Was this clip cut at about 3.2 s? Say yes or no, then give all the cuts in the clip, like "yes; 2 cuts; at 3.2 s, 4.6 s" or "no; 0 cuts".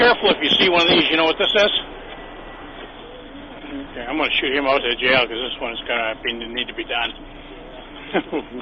yes; 1 cut; at 3.2 s